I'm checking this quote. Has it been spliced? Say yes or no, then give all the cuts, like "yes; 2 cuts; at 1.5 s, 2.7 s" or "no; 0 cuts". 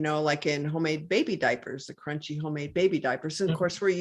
no; 0 cuts